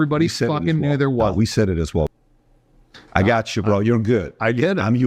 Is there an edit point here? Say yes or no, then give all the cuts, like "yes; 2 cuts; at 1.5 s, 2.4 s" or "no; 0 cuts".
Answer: yes; 1 cut; at 2.1 s